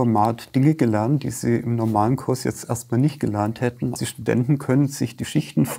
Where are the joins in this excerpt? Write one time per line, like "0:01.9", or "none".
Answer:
0:04.1